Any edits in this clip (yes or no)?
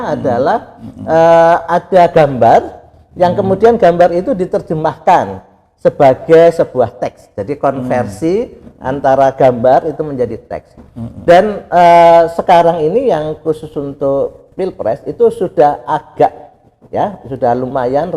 no